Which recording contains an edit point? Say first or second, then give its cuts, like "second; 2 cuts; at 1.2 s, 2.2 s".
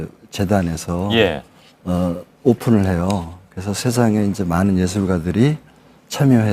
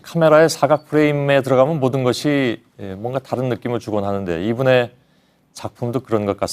first; 1 cut; at 5.2 s